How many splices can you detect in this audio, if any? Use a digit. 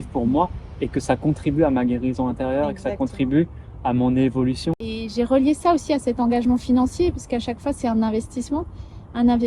1